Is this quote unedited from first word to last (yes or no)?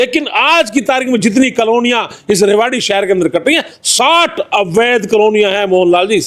yes